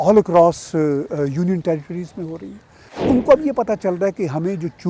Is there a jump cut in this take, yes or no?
yes